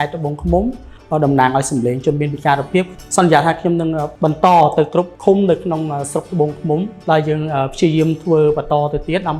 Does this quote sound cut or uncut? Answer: cut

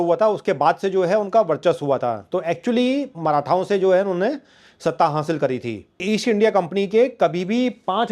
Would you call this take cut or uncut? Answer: cut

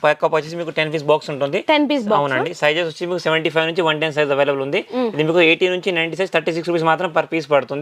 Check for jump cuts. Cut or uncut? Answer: uncut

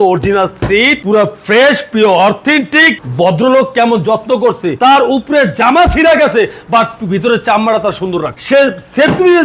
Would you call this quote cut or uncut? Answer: cut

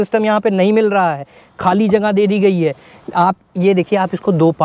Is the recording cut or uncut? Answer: uncut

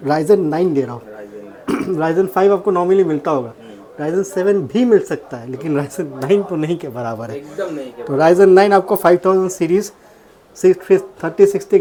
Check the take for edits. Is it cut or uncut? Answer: uncut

